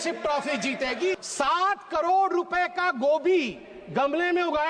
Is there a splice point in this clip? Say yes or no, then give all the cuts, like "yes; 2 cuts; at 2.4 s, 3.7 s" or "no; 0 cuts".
yes; 1 cut; at 1.2 s